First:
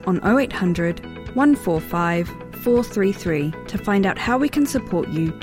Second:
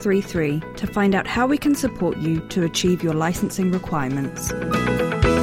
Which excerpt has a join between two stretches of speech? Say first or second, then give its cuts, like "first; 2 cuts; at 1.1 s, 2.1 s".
second; 1 cut; at 4.5 s